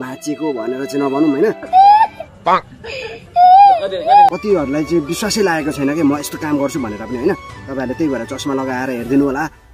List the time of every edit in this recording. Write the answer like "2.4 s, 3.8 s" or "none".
4.4 s